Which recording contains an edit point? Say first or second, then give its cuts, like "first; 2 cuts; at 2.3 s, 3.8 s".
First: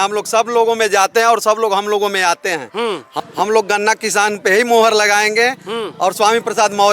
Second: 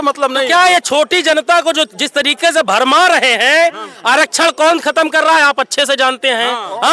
first; 1 cut; at 3.1 s